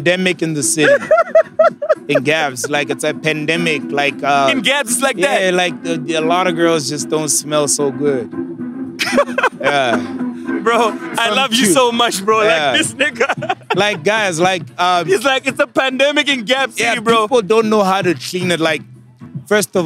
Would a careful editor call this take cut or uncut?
uncut